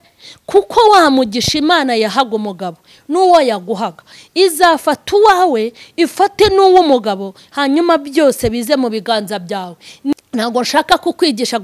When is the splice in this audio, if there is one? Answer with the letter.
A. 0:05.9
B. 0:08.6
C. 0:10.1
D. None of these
C